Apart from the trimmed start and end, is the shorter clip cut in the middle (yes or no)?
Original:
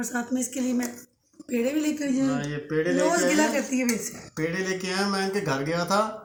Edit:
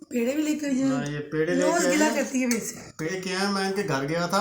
yes